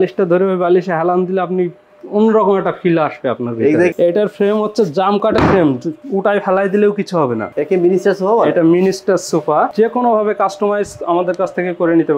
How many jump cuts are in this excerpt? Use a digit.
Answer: 3